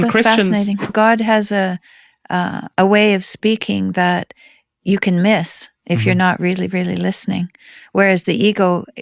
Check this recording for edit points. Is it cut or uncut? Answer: cut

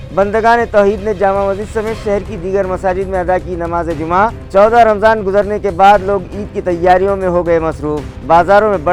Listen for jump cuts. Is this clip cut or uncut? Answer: uncut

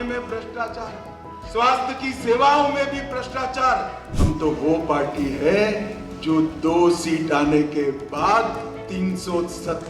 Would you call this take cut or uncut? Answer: cut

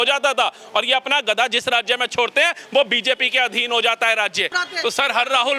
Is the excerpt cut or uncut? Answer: cut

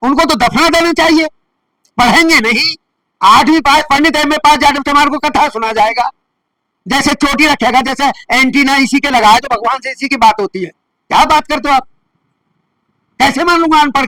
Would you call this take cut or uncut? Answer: uncut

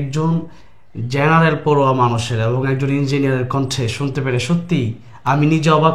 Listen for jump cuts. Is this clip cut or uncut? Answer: uncut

